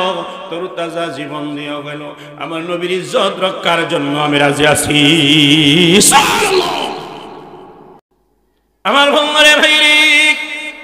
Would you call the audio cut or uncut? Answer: cut